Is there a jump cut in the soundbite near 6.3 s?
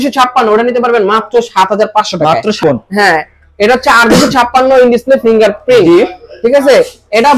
no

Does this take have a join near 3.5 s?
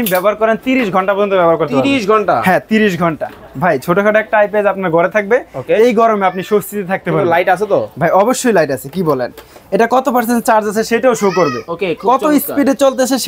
yes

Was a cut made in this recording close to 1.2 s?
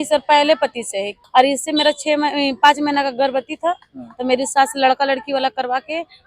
yes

